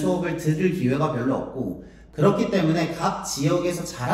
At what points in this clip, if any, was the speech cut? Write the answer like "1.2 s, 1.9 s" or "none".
2.0 s